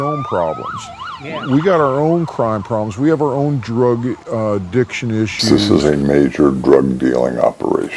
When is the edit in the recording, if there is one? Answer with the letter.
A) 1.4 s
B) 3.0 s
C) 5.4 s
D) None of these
C